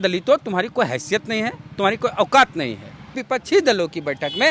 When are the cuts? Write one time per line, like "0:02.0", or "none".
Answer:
0:03.2